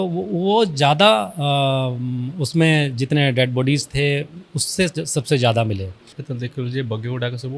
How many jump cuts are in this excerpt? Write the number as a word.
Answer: one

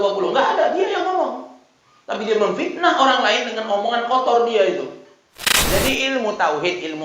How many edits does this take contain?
one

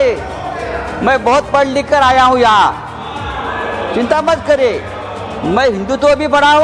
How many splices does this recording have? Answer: zero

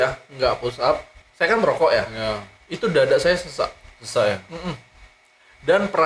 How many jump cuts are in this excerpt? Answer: one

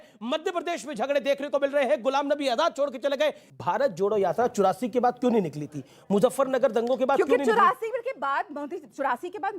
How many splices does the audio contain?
one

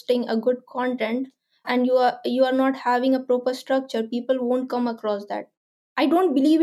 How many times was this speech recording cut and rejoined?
zero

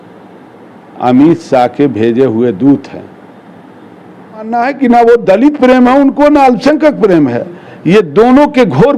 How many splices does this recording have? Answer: one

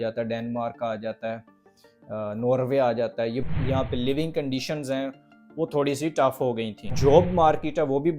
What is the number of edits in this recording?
two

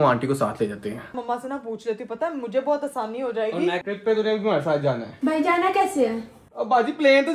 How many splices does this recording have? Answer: three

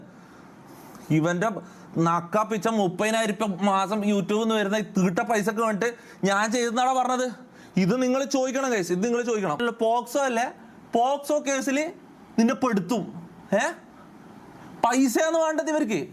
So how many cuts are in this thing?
one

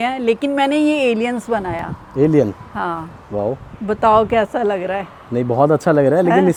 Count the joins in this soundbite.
zero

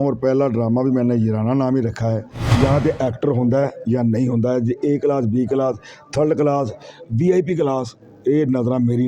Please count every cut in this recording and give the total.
one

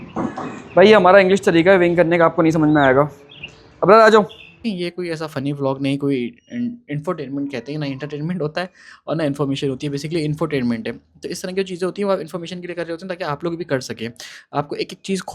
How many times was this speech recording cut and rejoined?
one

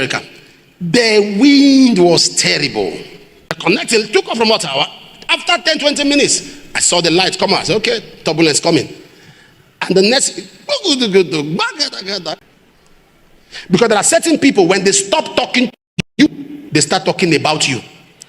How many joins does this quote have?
two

